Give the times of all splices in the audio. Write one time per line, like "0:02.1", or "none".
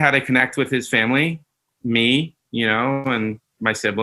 0:03.0